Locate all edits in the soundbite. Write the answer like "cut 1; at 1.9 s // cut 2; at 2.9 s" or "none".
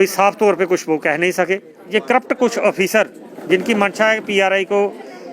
cut 1; at 1.7 s